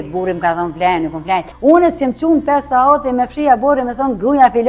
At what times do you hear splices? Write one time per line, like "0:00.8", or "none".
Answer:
0:01.5